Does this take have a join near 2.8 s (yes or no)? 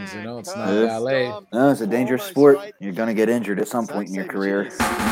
yes